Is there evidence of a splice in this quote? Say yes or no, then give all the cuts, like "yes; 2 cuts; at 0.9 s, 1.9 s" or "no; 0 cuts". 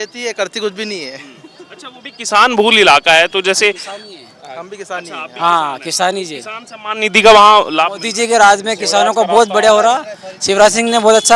no; 0 cuts